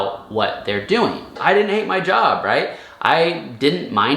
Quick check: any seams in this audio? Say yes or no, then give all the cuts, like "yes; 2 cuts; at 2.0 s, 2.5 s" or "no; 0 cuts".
yes; 1 cut; at 1.3 s